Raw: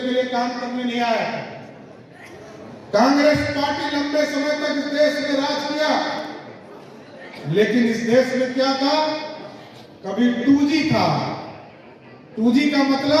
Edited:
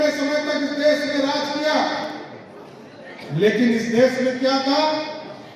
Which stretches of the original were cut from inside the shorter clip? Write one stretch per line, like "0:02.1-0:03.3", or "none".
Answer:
none